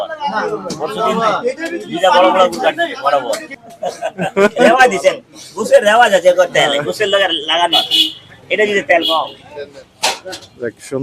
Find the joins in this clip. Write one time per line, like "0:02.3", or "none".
0:03.6